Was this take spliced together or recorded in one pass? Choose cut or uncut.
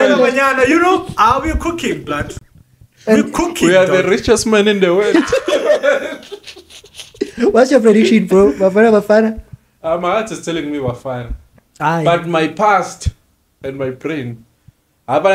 uncut